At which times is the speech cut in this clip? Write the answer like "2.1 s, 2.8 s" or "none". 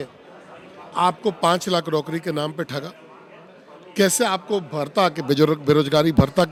none